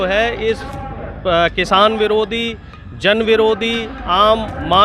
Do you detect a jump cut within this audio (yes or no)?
no